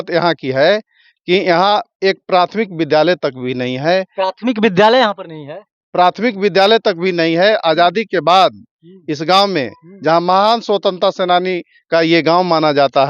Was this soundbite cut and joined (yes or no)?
no